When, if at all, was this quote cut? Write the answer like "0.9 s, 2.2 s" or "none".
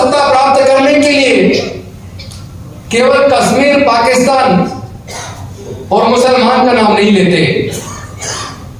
none